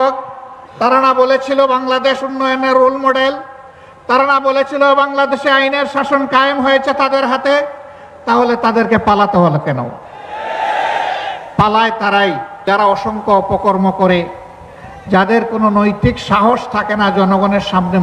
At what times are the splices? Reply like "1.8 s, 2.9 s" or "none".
none